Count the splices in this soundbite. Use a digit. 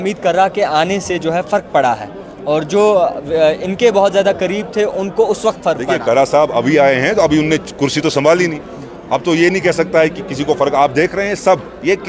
0